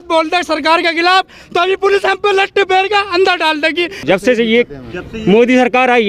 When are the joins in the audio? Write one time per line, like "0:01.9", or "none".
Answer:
0:04.0